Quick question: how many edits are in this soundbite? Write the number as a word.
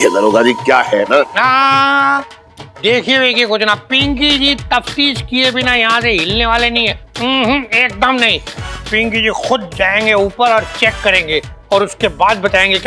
one